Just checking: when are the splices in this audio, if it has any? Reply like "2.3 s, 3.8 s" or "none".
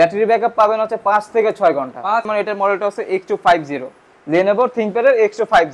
2.3 s